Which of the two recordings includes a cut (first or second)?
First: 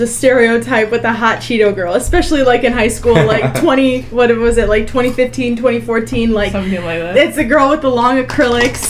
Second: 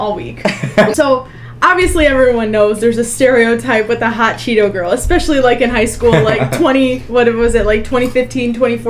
second